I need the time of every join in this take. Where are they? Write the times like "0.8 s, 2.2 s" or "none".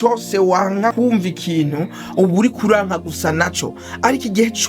0.9 s